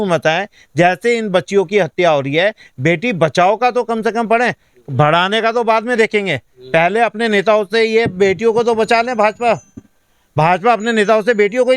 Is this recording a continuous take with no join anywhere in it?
yes; 0 cuts

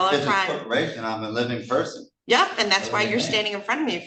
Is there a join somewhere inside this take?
no; 0 cuts

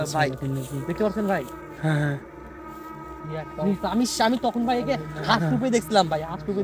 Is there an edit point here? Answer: no; 0 cuts

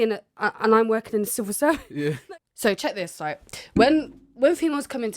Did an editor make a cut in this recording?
yes; 1 cut; at 2.2 s

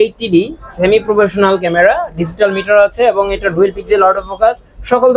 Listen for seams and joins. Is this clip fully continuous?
yes; 0 cuts

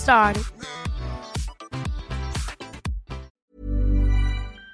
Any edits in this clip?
yes; 1 cut; at 3.3 s

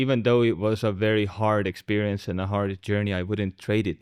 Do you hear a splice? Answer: no; 0 cuts

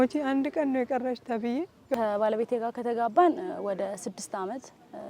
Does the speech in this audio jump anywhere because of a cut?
yes; 1 cut; at 1.9 s

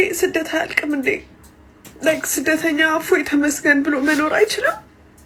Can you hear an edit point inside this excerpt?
no; 0 cuts

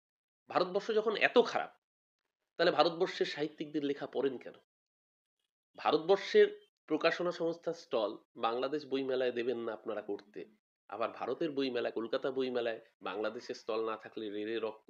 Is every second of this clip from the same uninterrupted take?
yes; 0 cuts

